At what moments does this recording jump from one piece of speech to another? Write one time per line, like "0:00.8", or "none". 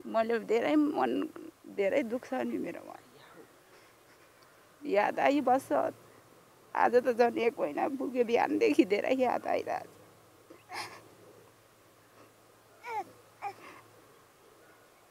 none